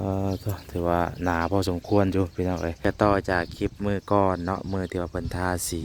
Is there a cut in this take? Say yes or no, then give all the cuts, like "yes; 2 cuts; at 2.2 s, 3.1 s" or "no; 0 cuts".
yes; 1 cut; at 2.8 s